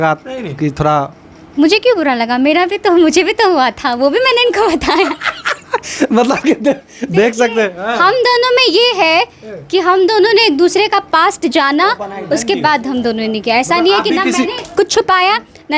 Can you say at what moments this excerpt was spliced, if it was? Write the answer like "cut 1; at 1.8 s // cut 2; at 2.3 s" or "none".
none